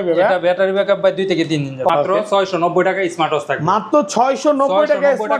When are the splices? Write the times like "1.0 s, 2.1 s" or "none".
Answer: 1.9 s